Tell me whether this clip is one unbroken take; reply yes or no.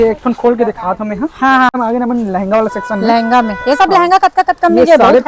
no